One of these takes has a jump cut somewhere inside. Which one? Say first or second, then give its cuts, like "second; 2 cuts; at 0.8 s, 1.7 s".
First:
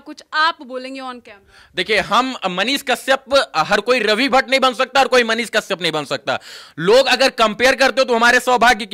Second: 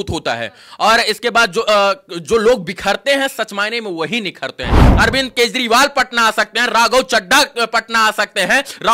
second; 1 cut; at 4.9 s